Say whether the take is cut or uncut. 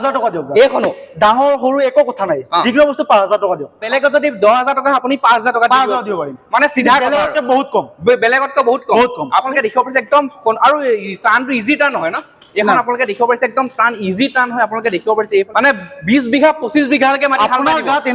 cut